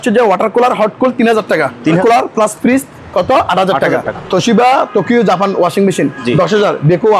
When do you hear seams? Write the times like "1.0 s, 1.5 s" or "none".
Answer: 2.0 s, 4.1 s